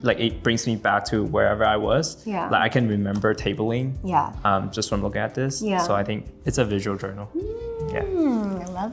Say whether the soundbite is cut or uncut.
uncut